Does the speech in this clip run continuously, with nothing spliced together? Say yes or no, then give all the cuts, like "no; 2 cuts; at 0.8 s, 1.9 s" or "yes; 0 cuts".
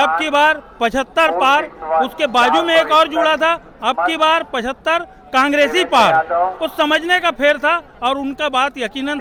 yes; 0 cuts